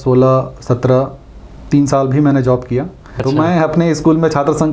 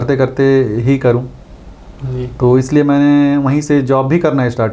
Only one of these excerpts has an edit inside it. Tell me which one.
first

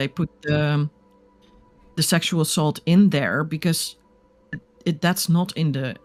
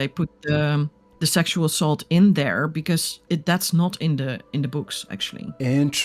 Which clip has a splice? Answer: second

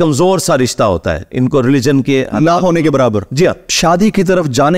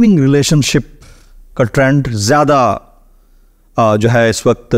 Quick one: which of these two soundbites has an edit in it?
first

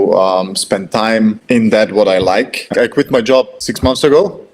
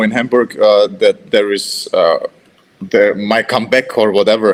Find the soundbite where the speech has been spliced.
first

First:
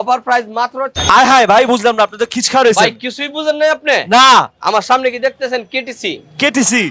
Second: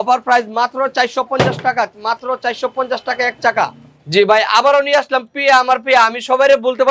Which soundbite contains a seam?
first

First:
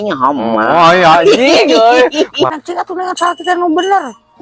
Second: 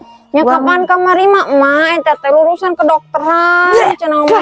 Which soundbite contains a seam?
first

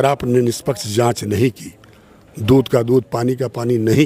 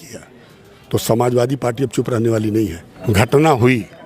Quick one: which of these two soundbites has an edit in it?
second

